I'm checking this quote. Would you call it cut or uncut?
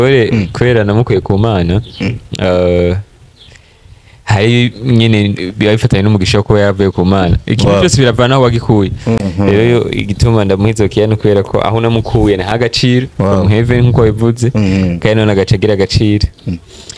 cut